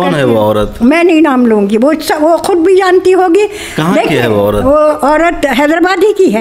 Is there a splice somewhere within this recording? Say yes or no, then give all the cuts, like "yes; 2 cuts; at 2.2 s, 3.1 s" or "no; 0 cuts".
no; 0 cuts